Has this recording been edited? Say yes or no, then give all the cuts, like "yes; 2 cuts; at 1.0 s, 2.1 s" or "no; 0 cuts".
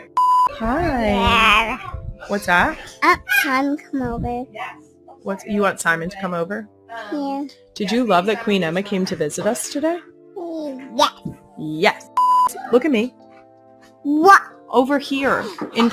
no; 0 cuts